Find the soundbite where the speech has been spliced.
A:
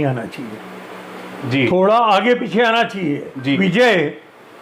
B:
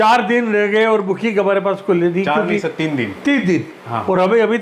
A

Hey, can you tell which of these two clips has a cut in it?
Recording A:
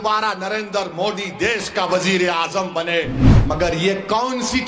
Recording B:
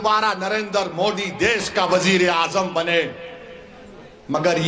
A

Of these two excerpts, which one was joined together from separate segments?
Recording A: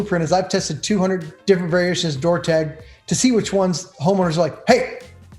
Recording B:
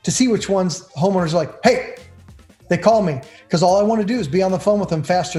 A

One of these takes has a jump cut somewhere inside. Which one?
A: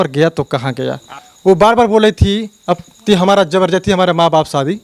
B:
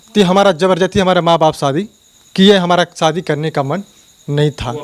A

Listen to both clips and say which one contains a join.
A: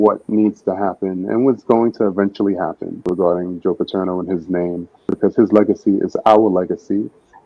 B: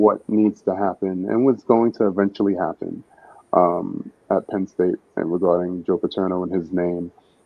A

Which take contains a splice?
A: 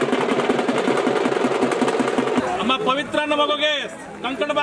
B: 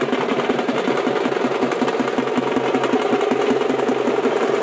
A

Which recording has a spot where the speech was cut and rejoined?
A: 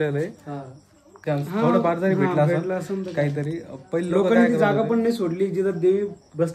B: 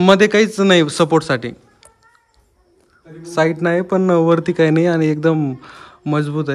A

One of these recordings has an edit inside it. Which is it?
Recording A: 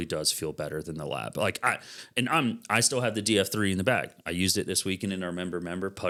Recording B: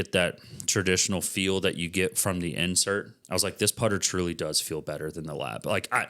B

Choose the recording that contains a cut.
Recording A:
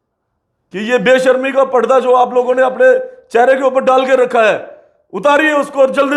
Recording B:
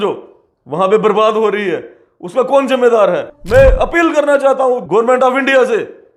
B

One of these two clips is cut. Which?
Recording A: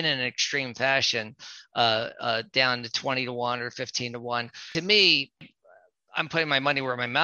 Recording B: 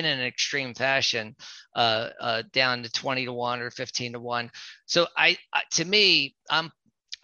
A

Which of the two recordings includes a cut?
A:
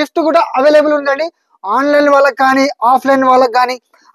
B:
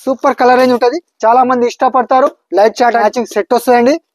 B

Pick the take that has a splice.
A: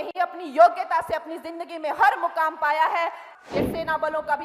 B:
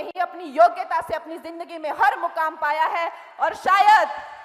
A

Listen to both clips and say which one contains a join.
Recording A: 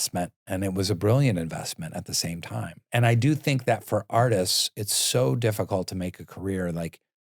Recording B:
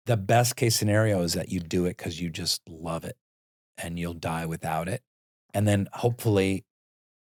A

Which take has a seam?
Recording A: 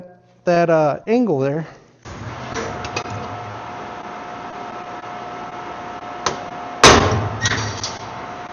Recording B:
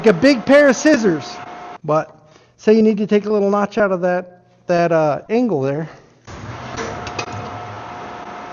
B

